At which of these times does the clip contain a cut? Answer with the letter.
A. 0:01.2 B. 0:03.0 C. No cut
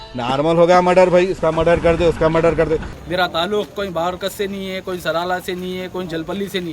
B